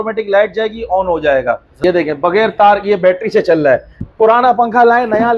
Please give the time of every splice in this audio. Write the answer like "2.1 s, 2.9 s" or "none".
1.8 s, 4.0 s